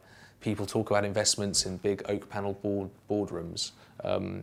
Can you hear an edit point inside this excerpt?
no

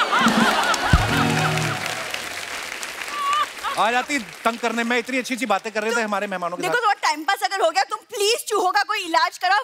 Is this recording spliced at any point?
no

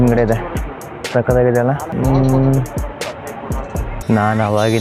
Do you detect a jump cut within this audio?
no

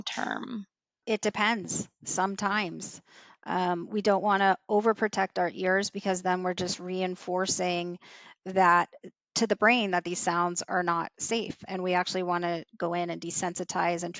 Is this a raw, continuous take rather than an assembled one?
no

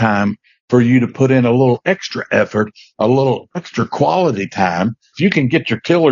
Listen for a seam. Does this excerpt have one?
yes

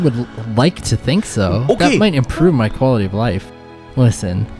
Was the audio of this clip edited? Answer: yes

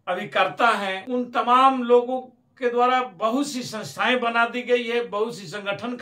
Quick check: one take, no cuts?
no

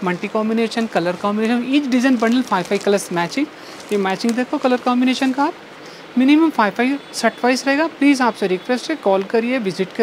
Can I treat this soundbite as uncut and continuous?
yes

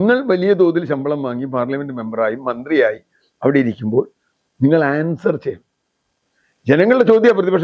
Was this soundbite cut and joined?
no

